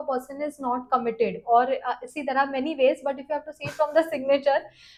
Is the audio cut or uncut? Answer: uncut